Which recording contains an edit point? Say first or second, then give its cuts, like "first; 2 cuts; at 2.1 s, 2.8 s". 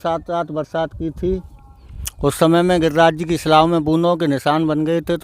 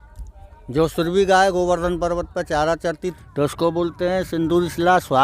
second; 1 cut; at 3.1 s